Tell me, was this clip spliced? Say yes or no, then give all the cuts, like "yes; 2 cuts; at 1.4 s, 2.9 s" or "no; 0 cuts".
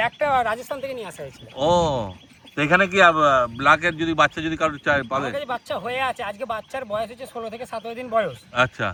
no; 0 cuts